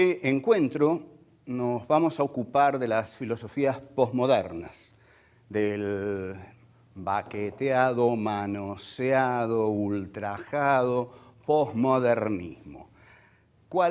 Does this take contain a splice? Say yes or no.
no